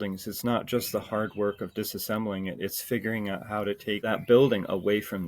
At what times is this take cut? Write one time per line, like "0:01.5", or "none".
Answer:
0:04.1